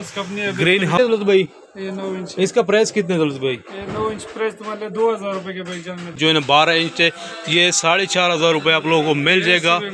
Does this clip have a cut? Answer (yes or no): yes